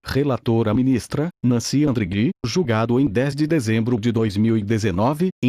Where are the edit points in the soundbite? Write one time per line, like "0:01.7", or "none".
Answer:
none